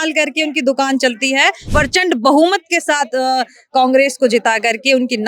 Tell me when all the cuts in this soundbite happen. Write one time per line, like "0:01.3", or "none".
0:01.6